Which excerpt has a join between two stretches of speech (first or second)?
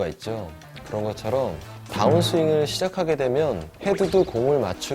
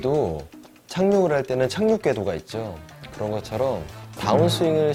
first